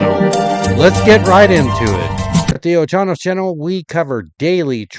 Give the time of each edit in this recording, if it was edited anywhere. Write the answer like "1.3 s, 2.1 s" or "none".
2.6 s